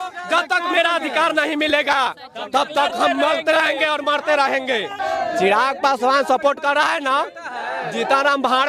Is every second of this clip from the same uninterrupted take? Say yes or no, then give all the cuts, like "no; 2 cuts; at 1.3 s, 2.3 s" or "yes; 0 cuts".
no; 1 cut; at 5.0 s